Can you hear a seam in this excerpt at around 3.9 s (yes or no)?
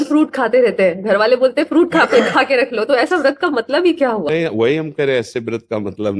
no